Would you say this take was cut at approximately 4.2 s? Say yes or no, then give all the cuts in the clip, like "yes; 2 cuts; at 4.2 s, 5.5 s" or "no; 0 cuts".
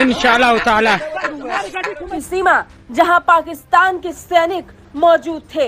no; 1 cut; at 2.2 s